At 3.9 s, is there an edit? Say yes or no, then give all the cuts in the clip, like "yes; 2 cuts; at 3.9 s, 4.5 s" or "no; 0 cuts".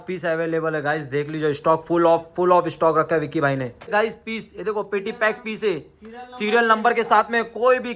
yes; 1 cut; at 3.9 s